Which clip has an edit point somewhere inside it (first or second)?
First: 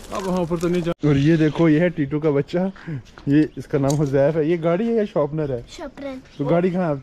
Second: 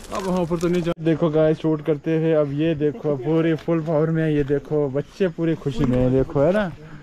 first